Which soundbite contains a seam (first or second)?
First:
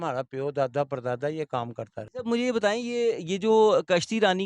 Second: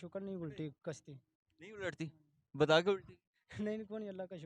first